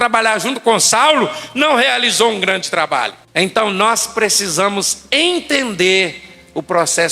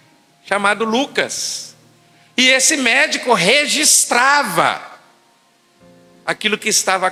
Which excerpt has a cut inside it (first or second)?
first